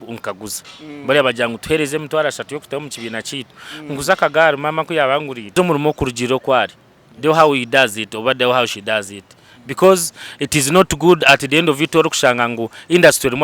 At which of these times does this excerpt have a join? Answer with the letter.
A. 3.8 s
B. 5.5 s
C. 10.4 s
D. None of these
B